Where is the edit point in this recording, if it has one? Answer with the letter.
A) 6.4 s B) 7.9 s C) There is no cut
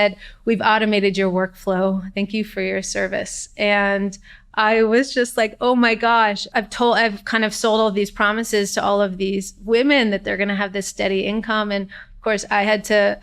A